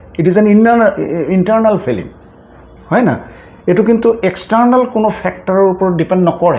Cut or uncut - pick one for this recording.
uncut